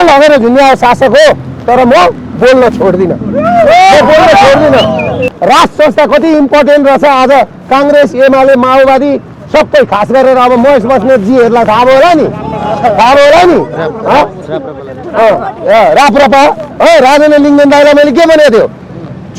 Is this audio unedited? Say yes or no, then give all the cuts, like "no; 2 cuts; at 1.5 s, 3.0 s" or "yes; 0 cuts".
no; 1 cut; at 5.3 s